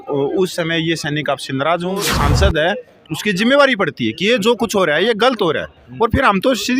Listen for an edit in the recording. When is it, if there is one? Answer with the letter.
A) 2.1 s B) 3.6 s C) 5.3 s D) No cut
A